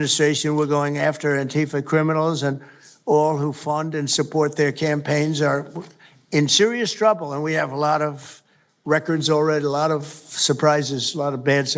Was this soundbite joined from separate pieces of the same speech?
no; 0 cuts

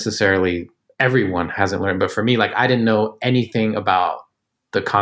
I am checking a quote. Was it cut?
no; 0 cuts

